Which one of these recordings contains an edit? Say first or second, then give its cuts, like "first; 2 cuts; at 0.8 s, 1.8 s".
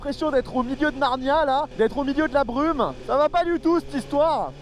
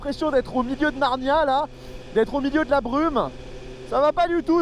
first; 2 cuts; at 1.7 s, 3.0 s